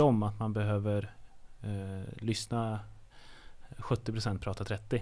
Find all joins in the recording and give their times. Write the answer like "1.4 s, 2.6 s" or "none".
none

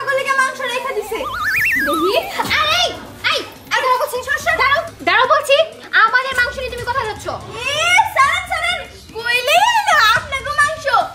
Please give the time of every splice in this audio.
4.9 s

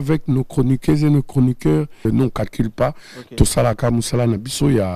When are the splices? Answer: 2.0 s

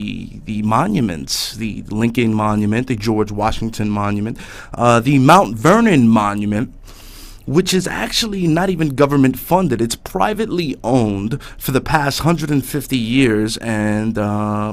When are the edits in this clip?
none

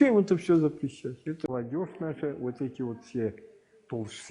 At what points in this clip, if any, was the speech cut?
1.5 s

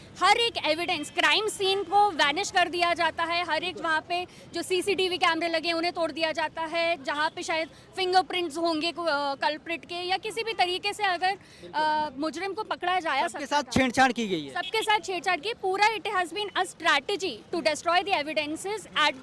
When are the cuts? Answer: none

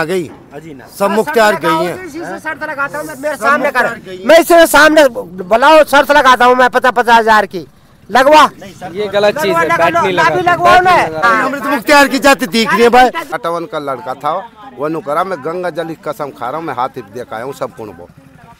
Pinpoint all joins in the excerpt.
11.3 s, 13.4 s

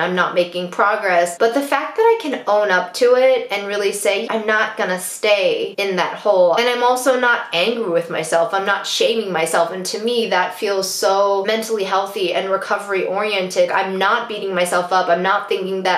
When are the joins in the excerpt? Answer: 4.2 s, 6.6 s, 13.7 s

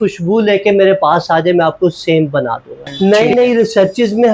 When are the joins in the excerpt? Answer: 3.1 s

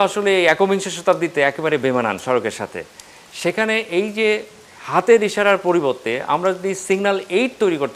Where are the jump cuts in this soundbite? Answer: none

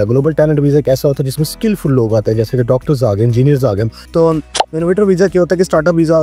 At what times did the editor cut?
3.9 s

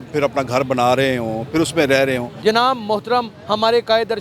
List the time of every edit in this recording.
2.3 s

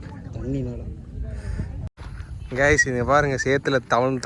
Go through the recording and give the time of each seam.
1.9 s

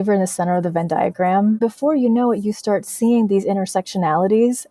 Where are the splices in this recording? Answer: 1.6 s

